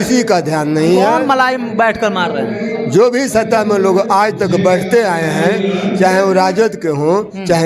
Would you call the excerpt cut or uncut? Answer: uncut